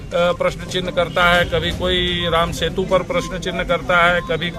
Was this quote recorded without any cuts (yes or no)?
yes